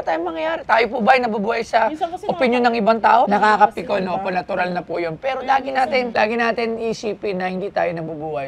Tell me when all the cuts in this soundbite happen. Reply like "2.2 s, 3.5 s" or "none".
3.3 s, 6.1 s

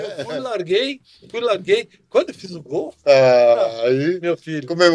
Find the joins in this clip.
none

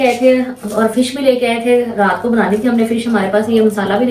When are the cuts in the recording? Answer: none

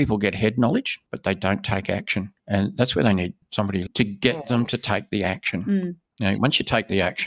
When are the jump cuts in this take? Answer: 1.0 s, 2.4 s, 3.9 s, 6.0 s

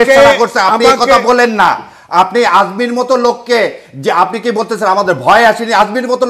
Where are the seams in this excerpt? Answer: none

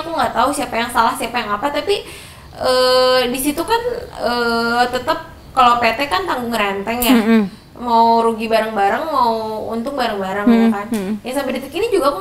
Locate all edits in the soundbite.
none

